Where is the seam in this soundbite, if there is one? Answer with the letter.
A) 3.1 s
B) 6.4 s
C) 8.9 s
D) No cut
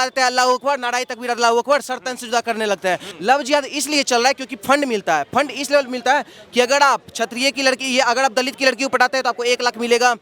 A